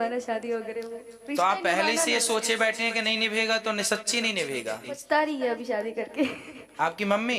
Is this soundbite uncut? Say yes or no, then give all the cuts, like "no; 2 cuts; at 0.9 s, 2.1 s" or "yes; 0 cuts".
no; 1 cut; at 4.9 s